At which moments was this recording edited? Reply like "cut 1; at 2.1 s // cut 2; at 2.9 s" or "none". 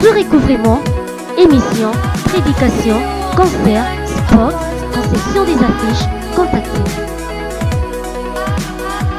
none